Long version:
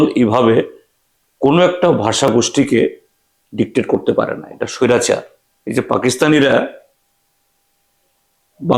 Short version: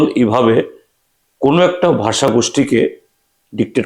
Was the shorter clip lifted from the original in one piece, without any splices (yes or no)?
yes